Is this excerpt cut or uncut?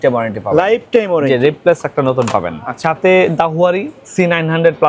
uncut